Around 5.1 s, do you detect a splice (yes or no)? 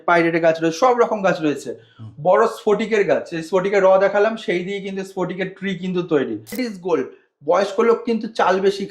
no